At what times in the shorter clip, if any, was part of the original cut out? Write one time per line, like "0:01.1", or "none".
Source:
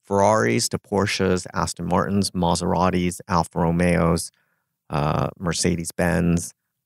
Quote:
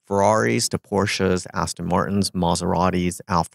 none